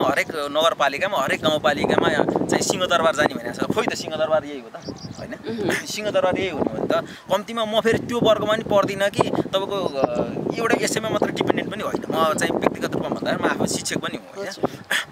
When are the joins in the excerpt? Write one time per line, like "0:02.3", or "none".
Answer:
none